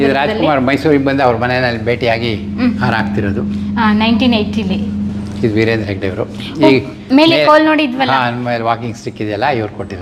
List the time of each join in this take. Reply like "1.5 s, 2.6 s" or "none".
none